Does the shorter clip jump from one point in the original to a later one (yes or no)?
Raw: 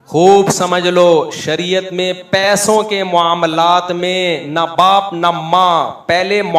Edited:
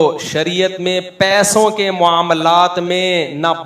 no